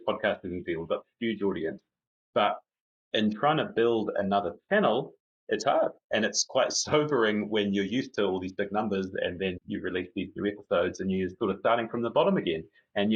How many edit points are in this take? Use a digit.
1